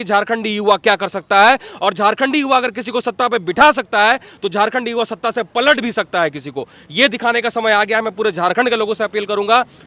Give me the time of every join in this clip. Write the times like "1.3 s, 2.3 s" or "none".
none

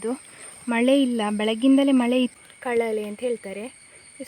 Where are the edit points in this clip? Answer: 2.4 s

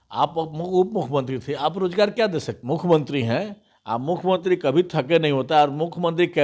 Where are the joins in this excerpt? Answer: 2.5 s

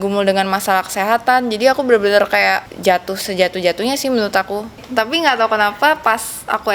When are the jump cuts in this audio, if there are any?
2.7 s, 4.8 s

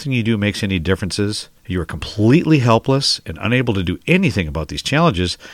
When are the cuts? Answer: 1.5 s

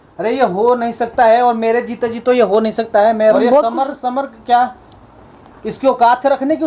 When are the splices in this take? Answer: 3.3 s

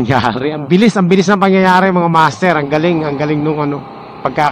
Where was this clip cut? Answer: none

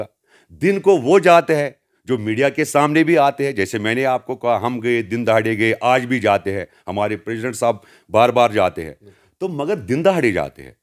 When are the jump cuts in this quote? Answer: none

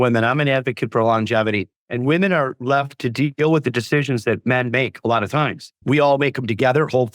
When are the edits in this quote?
5.7 s

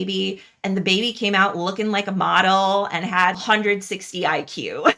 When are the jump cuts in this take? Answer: 3.4 s

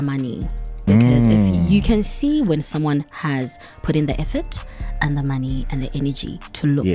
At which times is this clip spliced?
none

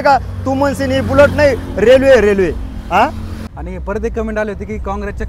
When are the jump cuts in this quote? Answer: 3.6 s

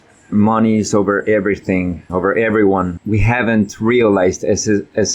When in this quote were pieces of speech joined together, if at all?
2.0 s, 2.9 s

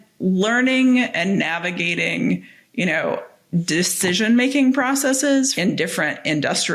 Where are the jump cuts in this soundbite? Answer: 5.5 s

